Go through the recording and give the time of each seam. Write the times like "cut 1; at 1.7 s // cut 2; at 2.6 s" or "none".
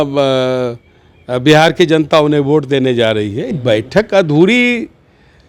cut 1; at 3.5 s